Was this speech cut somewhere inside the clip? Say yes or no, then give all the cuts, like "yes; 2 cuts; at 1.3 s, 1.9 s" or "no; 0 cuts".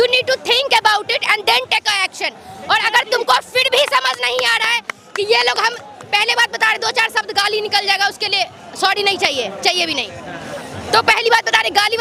no; 0 cuts